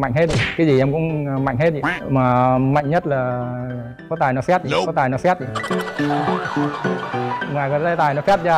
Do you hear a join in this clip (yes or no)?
no